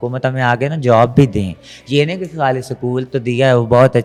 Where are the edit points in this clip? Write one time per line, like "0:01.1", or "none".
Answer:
none